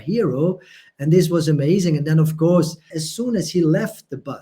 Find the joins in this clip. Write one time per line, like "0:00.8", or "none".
0:03.0